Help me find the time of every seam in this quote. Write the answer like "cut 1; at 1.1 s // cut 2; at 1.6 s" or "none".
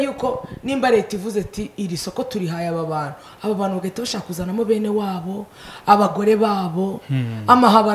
none